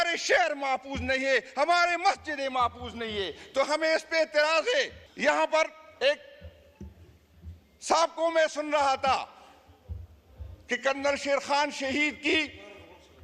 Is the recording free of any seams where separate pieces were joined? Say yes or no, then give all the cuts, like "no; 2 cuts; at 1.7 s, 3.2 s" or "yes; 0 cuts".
no; 1 cut; at 5.0 s